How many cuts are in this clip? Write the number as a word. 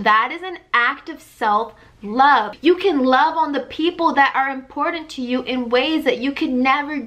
one